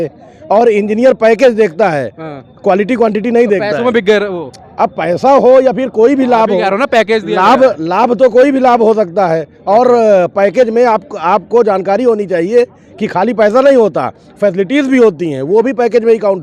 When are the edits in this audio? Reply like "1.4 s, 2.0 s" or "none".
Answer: none

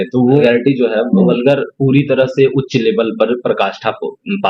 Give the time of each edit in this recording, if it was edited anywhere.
none

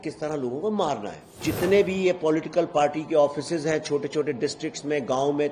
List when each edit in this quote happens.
1.4 s

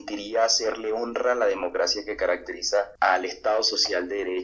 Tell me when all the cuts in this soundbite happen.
2.9 s

